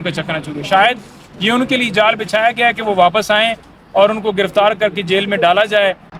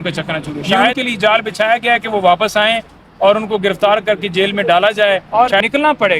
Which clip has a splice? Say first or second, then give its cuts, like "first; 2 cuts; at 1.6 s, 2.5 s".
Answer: second; 2 cuts; at 1.0 s, 5.3 s